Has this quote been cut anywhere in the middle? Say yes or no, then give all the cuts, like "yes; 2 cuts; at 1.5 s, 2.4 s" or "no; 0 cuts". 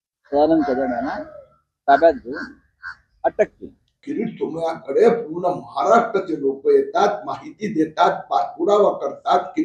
yes; 1 cut; at 4.0 s